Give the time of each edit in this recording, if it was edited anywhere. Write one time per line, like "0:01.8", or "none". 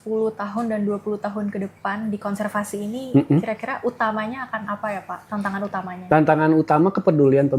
0:05.2